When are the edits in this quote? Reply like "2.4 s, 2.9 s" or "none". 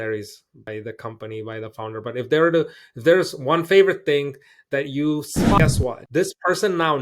5.6 s